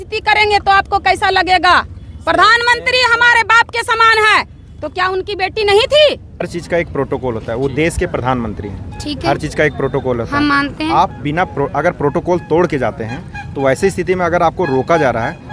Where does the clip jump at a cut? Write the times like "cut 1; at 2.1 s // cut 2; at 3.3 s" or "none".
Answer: cut 1; at 6.5 s